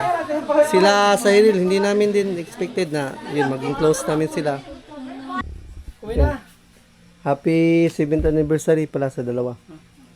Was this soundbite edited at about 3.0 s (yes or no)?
no